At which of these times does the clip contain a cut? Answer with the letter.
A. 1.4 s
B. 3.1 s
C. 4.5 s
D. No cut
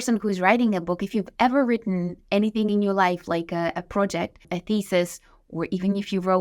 C